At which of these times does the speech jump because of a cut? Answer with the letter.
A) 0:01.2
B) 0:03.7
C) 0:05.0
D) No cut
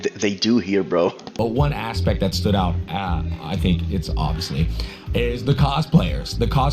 A